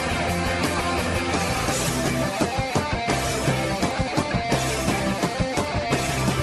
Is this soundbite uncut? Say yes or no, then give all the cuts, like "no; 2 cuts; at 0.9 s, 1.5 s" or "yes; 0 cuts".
yes; 0 cuts